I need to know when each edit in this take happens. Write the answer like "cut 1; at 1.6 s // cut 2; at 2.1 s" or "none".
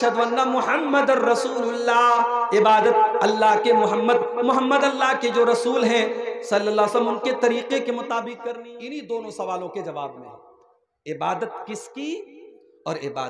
cut 1; at 8.7 s